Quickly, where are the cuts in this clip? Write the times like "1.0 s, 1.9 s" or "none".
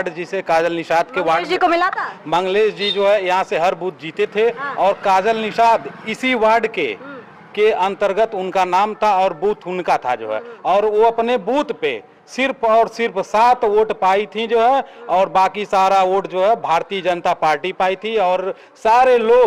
none